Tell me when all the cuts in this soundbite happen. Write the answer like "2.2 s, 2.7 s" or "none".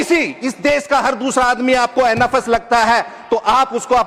none